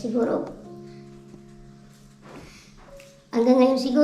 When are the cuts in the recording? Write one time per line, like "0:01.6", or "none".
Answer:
none